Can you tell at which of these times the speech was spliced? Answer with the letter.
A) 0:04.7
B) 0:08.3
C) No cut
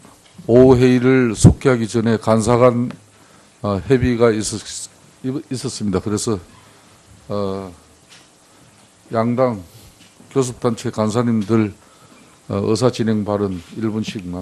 A